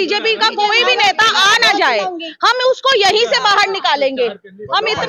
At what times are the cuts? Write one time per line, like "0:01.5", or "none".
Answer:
none